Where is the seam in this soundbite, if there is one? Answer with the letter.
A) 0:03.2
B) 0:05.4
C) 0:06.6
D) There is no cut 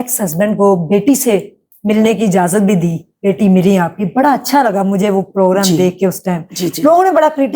D